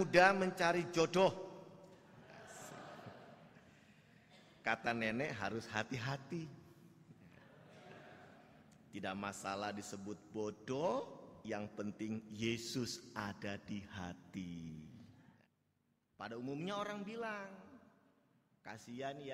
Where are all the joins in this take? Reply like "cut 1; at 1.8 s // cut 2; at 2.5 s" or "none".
cut 1; at 15.2 s